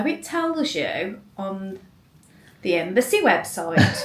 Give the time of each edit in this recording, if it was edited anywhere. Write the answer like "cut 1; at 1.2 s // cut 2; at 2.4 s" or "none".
none